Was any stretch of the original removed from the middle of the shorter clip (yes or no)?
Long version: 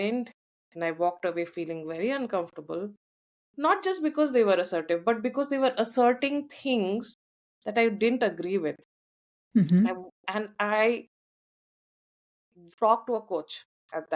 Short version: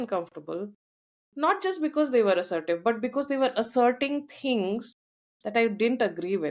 no